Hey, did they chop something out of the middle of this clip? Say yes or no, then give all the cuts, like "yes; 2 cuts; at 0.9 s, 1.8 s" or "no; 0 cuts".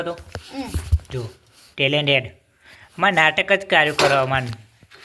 no; 0 cuts